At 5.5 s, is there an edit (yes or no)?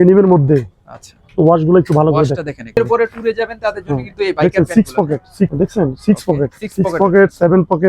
yes